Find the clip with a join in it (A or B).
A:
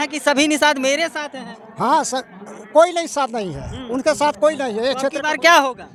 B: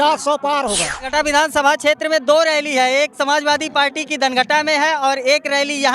B